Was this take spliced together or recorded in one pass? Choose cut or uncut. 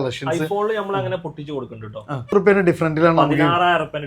cut